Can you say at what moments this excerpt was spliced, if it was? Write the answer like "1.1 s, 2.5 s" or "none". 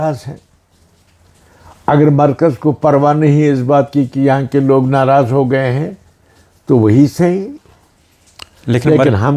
none